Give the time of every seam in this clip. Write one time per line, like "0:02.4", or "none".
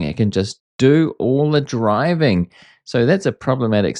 none